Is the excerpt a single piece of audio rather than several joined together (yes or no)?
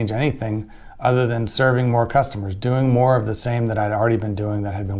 yes